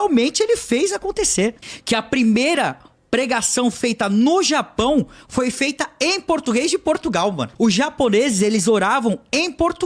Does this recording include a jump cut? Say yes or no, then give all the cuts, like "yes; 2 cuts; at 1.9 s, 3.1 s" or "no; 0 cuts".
yes; 2 cuts; at 1.7 s, 7.5 s